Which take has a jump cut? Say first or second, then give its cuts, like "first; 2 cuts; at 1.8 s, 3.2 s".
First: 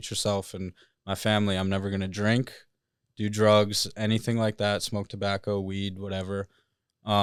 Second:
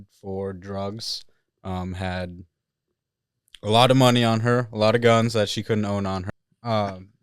second; 1 cut; at 6.2 s